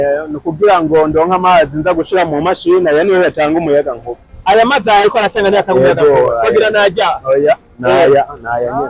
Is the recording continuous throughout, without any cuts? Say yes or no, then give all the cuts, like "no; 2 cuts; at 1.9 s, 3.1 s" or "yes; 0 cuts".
yes; 0 cuts